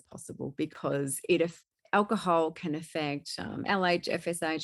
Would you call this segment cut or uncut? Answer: uncut